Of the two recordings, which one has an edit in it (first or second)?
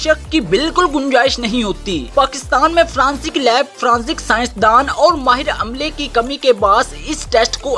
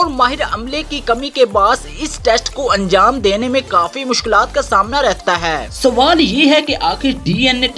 second